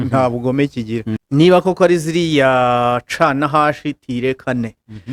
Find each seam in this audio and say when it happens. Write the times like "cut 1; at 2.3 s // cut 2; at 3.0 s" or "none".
cut 1; at 1.2 s